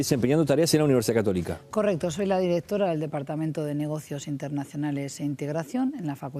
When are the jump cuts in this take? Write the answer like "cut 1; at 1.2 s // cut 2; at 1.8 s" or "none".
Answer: cut 1; at 1.8 s